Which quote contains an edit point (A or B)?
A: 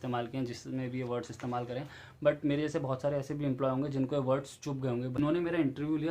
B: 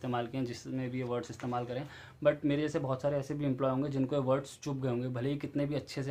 A